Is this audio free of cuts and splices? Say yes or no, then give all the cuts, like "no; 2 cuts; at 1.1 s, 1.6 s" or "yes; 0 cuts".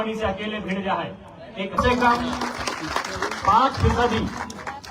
no; 1 cut; at 1.8 s